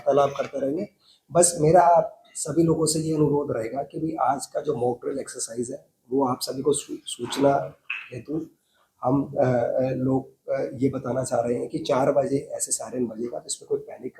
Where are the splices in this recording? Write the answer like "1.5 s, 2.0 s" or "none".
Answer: none